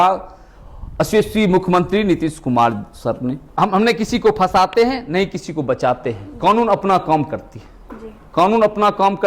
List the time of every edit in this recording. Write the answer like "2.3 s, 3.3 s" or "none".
3.5 s